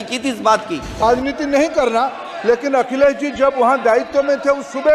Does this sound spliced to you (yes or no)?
yes